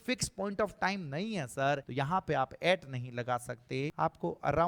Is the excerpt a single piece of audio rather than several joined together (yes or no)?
no